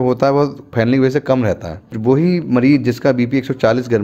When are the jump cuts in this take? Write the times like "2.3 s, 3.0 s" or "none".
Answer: 1.9 s